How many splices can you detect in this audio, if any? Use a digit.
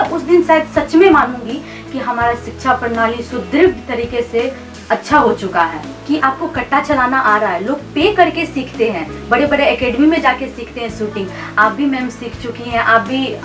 1